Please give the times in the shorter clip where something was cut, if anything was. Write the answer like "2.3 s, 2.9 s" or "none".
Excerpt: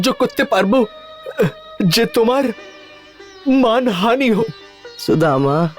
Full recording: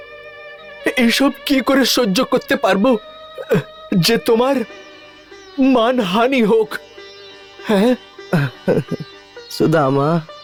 4.4 s